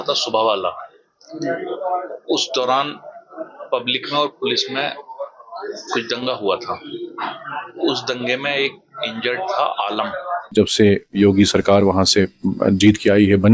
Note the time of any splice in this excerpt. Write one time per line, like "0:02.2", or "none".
0:10.5

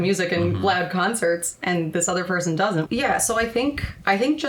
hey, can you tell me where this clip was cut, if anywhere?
0:02.9

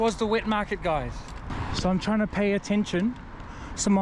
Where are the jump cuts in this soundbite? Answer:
0:01.6

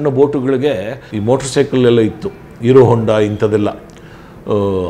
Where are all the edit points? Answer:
0:01.0

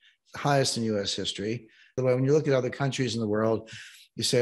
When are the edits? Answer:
0:02.0

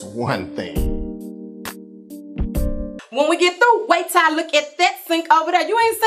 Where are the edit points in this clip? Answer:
0:03.0

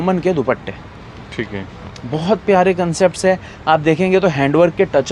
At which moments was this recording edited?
none

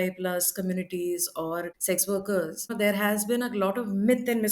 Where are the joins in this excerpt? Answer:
0:01.7
0:02.7

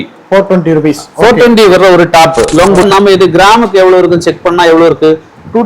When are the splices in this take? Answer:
0:02.8

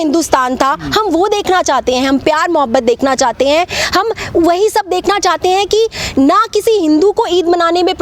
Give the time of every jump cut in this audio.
none

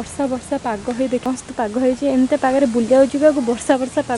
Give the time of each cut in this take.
0:01.2

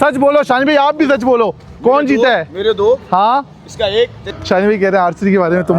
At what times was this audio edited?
0:04.2

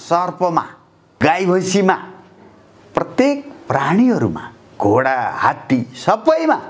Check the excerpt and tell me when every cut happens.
0:01.2

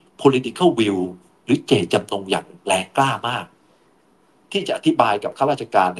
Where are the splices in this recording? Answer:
none

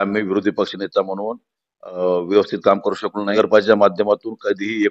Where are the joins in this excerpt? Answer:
0:03.3

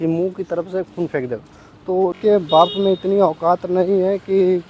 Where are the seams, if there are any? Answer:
0:02.2

